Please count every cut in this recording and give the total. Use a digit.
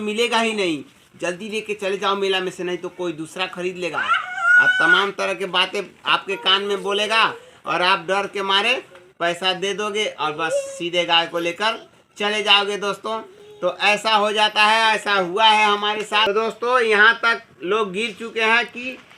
1